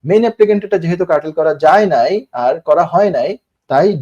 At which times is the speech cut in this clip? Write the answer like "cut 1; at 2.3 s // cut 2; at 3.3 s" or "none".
none